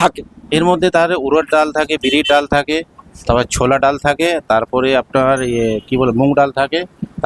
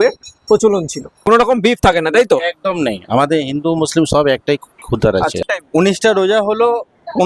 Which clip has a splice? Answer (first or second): second